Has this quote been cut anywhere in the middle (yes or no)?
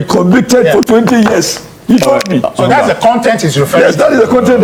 no